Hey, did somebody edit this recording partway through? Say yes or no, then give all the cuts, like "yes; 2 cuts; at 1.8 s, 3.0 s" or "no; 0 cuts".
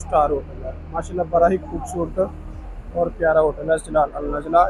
no; 0 cuts